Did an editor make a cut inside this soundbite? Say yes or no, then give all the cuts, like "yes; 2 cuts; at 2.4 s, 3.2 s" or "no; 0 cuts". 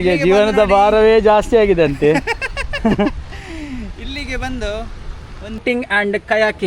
yes; 1 cut; at 5.6 s